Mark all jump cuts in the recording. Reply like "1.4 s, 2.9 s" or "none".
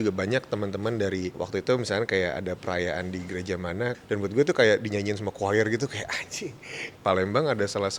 1.4 s, 3.9 s, 6.9 s